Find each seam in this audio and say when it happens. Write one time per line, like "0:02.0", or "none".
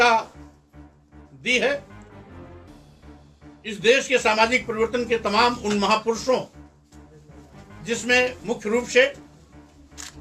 0:01.8
0:03.6